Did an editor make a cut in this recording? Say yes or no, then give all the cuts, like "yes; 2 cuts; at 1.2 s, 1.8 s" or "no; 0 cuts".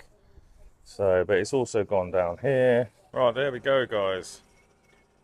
yes; 1 cut; at 3.0 s